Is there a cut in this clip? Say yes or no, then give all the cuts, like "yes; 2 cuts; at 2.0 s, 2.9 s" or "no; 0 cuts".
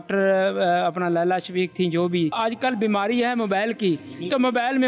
yes; 1 cut; at 2.3 s